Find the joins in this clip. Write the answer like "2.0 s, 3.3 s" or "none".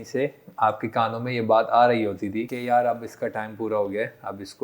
2.5 s